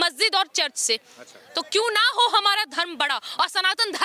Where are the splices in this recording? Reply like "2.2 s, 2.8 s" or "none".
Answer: none